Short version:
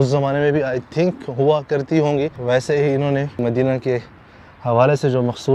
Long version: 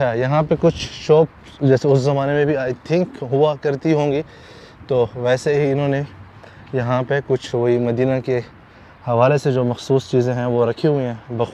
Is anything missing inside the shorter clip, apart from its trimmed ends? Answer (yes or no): yes